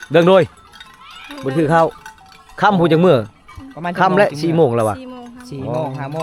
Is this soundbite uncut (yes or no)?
yes